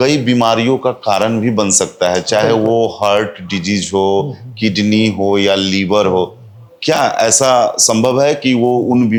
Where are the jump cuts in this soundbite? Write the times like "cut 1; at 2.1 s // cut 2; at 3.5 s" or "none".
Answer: none